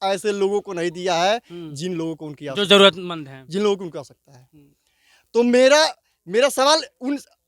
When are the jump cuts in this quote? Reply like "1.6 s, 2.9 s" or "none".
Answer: none